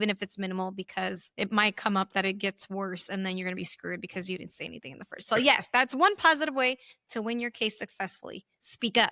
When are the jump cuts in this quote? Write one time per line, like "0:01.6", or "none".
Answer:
0:01.2